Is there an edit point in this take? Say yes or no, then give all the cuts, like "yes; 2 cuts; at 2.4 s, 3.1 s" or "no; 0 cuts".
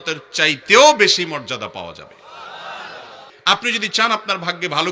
yes; 1 cut; at 3.6 s